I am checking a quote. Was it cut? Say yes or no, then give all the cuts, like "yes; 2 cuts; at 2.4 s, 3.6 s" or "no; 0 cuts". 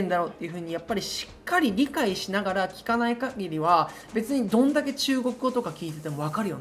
no; 0 cuts